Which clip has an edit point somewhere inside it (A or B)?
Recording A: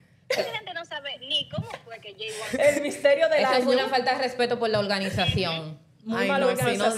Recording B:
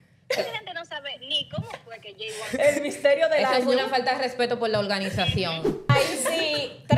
B